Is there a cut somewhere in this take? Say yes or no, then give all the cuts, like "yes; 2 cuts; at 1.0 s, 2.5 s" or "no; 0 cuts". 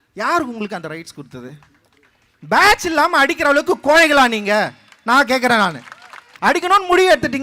yes; 1 cut; at 6.3 s